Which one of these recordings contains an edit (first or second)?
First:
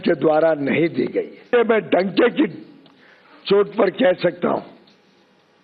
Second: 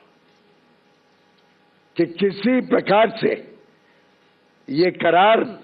first